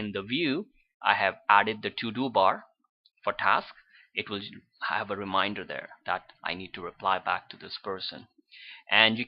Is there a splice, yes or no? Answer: yes